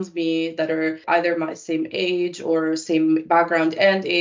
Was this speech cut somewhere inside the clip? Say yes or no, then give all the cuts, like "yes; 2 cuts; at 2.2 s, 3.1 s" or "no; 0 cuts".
yes; 1 cut; at 1.0 s